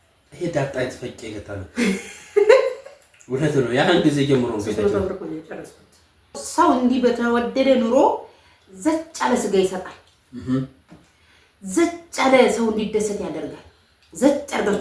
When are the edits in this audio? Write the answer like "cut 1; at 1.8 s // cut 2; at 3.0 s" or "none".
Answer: cut 1; at 6.4 s